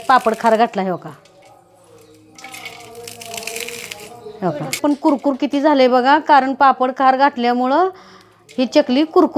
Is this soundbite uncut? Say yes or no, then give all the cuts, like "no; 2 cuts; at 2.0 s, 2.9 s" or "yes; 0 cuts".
yes; 0 cuts